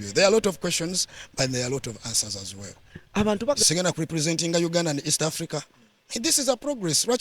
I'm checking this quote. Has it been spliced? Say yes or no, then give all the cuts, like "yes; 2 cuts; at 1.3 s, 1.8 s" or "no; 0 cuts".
yes; 1 cut; at 3.6 s